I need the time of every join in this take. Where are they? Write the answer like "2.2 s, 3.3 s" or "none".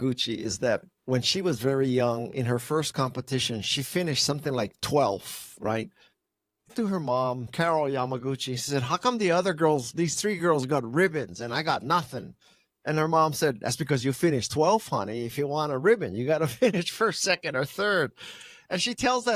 6.7 s